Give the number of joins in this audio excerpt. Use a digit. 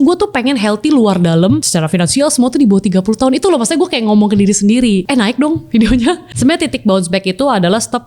3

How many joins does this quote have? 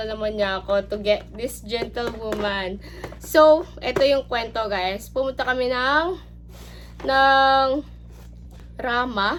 0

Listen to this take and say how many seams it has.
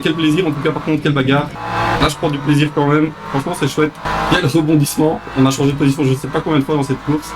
2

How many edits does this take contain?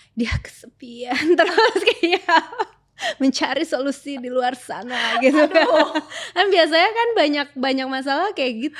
0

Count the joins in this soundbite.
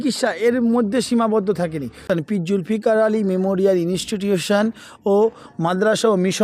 1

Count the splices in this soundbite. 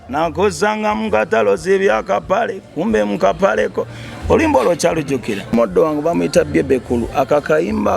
1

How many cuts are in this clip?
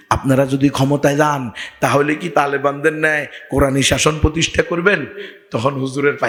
0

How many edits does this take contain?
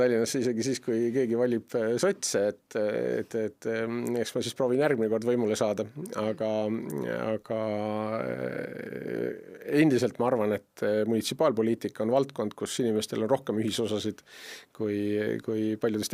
0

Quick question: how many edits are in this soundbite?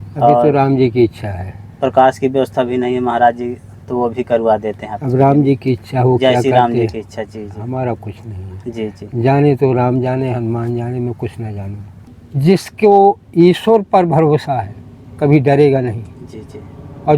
0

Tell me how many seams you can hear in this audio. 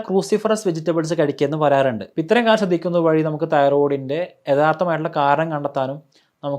1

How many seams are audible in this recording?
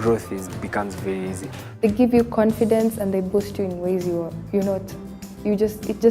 1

